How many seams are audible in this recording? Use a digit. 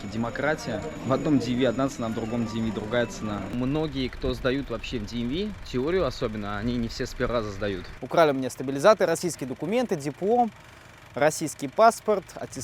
3